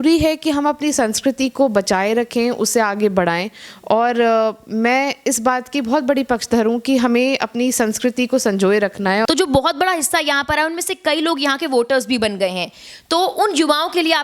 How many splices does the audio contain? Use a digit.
1